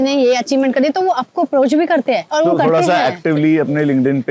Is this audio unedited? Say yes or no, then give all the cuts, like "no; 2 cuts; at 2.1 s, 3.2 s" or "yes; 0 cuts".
yes; 0 cuts